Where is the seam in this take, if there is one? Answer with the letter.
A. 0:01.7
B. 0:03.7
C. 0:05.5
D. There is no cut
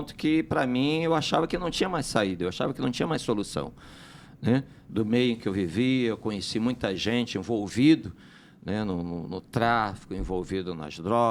D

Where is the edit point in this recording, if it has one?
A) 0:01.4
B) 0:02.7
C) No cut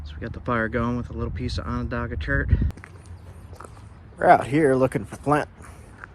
B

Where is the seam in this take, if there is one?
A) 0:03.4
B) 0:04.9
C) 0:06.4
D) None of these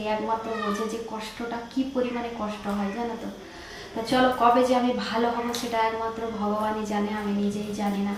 D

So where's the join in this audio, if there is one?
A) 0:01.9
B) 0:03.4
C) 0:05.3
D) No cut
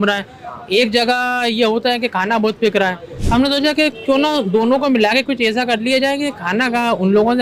D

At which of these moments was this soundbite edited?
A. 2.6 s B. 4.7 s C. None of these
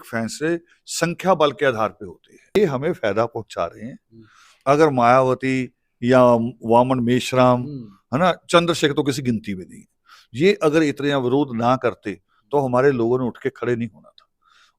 A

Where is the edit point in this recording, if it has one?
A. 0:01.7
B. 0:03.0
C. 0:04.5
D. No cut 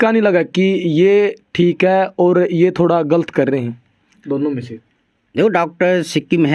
D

